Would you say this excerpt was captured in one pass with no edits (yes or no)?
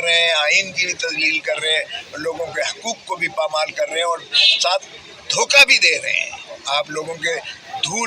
no